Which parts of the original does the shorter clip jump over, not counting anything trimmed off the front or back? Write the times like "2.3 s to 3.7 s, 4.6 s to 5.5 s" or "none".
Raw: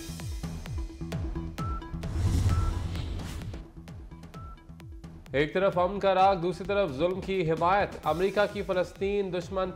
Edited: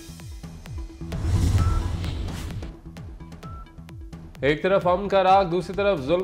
1.1 s to 2.0 s